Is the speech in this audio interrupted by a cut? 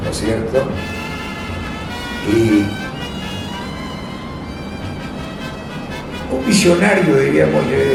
no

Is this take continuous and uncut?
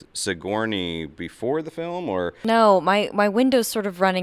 no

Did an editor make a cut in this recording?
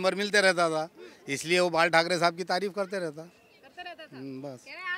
no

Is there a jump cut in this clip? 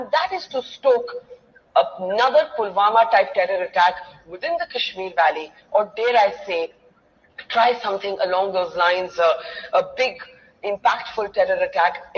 no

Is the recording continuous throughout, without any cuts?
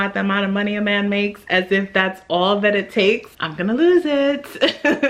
yes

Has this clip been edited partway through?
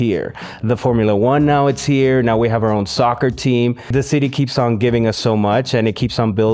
yes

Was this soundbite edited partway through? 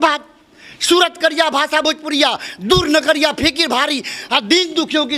no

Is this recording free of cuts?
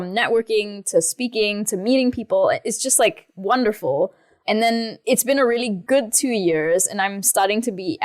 no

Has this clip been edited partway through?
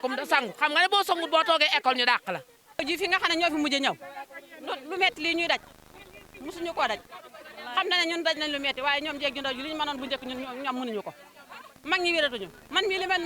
yes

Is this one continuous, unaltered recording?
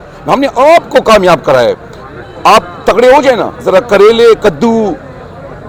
yes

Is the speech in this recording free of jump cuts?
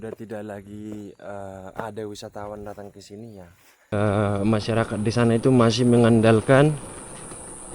no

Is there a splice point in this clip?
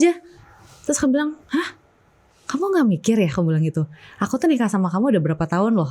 no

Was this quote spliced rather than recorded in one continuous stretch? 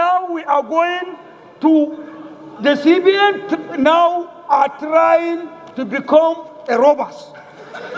no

